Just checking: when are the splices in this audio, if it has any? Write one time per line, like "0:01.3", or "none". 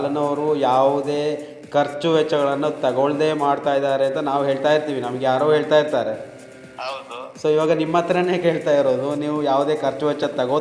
none